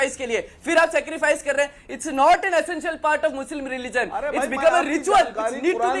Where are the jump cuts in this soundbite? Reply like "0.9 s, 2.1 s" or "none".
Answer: none

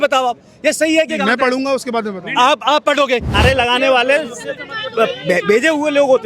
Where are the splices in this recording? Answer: 3.4 s

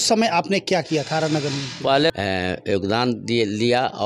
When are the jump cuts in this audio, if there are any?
2.1 s

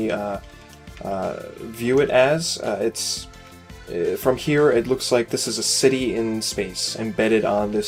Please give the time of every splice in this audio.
none

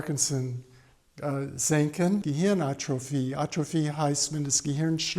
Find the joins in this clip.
2.2 s

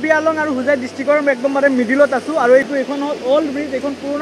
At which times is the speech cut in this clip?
2.7 s

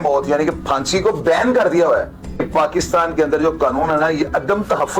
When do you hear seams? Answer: 2.2 s

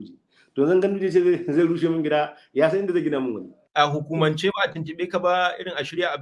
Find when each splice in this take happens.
3.6 s

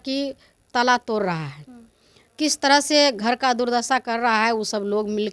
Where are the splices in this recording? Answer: none

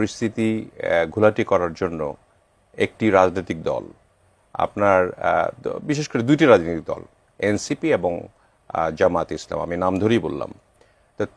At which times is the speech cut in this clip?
none

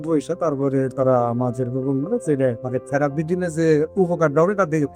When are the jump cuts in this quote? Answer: 2.6 s

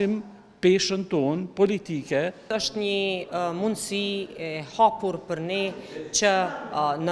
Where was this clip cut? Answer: 2.5 s

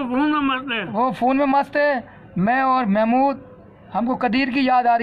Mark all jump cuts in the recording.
none

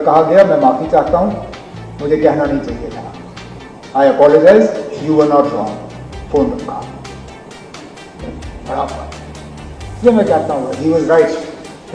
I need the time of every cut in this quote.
7.5 s

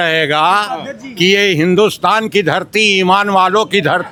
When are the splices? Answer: none

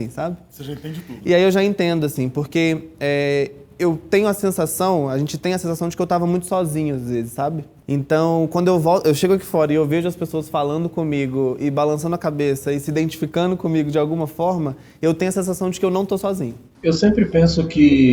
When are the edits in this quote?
7.7 s, 16.6 s

